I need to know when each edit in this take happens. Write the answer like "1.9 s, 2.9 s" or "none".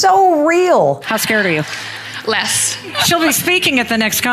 1.0 s